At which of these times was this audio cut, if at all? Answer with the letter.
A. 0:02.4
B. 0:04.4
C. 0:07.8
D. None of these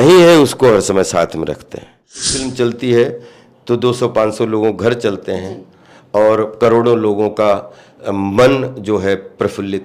A